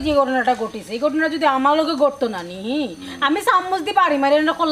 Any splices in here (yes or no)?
no